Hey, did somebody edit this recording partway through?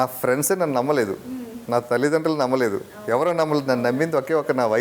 no; 0 cuts

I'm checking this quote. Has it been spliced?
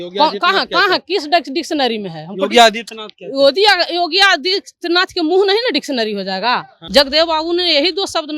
yes; 1 cut; at 6.7 s

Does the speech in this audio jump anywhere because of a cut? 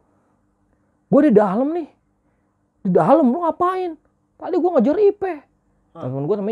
no; 0 cuts

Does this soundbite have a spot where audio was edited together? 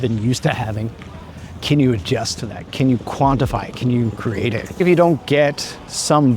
yes; 1 cut; at 4.7 s

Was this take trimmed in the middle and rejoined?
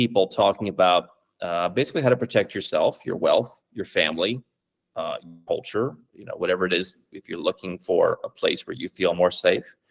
no; 0 cuts

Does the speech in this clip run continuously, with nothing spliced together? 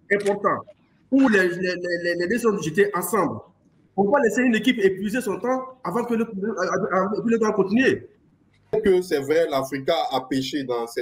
no; 1 cut; at 8.8 s

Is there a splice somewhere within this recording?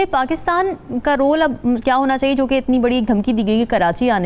no; 0 cuts

